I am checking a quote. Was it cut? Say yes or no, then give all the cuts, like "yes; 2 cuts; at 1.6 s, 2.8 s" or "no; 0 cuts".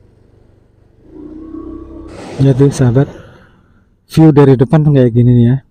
yes; 1 cut; at 2.1 s